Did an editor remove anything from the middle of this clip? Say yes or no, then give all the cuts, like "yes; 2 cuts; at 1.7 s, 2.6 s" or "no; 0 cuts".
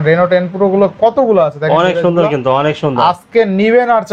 no; 0 cuts